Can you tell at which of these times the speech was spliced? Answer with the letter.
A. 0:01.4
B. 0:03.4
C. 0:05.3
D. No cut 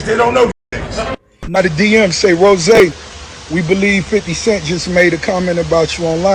A